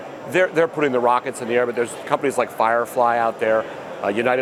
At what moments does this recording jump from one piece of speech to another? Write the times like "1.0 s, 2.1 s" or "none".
none